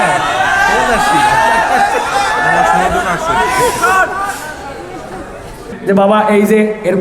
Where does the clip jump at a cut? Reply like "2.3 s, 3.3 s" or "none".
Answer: 5.7 s